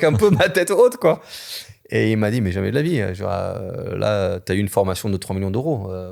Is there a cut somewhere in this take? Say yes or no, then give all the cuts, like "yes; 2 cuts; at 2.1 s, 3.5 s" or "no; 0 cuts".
no; 0 cuts